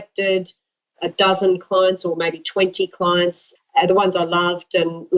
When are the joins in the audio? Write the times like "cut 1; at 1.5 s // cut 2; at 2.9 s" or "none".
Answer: cut 1; at 0.9 s // cut 2; at 3.5 s

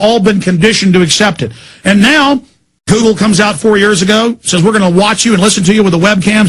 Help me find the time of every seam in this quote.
none

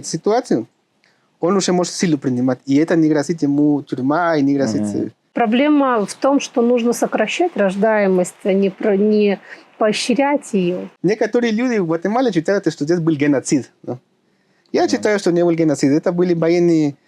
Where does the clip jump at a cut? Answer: cut 1; at 5.2 s // cut 2; at 10.9 s

